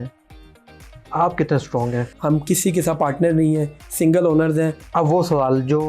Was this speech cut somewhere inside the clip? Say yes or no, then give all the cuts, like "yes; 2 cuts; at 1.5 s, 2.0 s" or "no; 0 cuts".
yes; 2 cuts; at 2.1 s, 4.8 s